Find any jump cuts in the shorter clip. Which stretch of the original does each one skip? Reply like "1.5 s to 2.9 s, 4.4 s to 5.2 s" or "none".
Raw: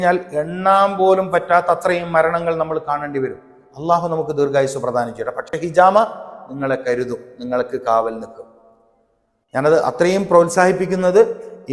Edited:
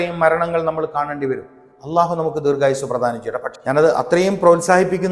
5.4 s to 9.4 s